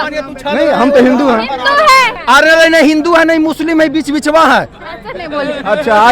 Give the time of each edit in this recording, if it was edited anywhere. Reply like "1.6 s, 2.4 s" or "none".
2.1 s